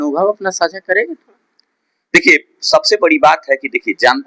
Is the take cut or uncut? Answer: uncut